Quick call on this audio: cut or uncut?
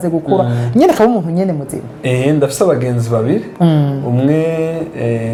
uncut